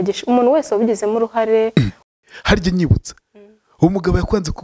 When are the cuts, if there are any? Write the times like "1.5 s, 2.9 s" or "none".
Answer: 2.0 s

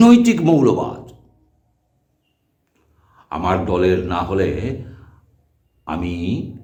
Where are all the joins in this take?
none

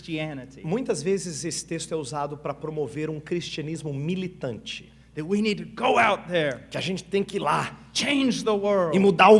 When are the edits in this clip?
3.7 s

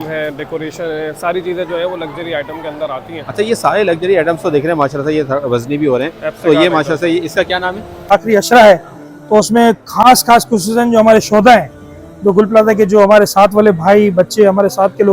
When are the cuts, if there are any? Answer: 8.1 s

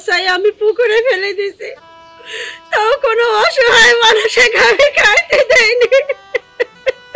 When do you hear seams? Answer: none

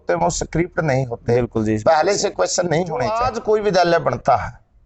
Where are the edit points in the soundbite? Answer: 3.3 s

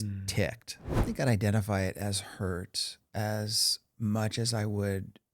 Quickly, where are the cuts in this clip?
1.0 s

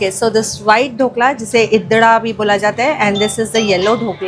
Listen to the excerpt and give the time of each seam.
none

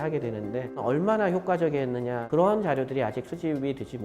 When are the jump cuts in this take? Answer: 0.8 s, 2.2 s

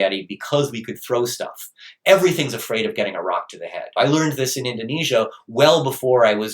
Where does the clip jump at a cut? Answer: 3.8 s

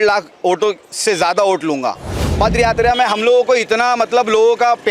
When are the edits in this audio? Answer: 2.2 s

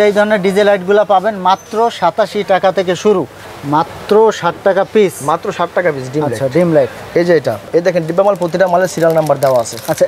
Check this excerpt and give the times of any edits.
3.4 s, 7.6 s

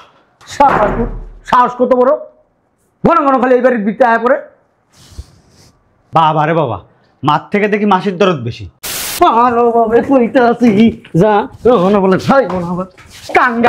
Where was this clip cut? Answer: 9.0 s

